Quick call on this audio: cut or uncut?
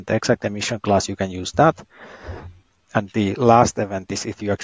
uncut